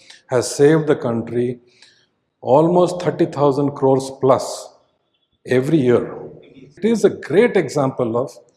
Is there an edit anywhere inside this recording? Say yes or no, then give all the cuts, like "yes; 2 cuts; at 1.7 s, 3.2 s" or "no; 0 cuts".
yes; 1 cut; at 6.8 s